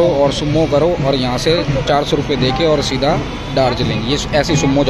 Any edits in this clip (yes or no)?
no